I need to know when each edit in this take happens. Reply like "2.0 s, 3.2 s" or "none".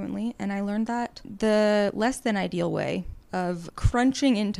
1.2 s, 3.4 s